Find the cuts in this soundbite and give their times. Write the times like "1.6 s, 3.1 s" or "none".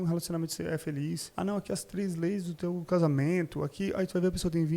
1.3 s